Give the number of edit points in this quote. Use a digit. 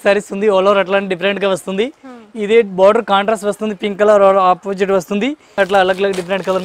1